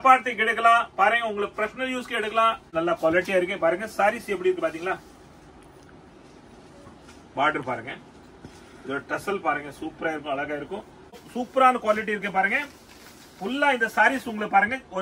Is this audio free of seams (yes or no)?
no